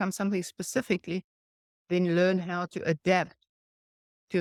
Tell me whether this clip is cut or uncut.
uncut